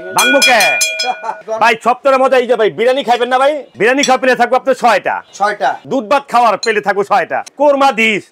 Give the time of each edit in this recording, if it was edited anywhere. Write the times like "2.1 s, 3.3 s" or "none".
1.3 s, 3.7 s, 5.8 s, 7.5 s